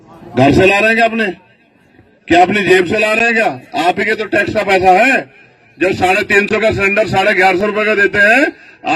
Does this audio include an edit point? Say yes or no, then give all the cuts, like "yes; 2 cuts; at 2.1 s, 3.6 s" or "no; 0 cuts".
no; 0 cuts